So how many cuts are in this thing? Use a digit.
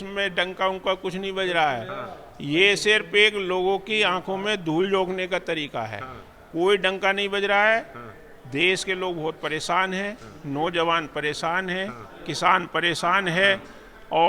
0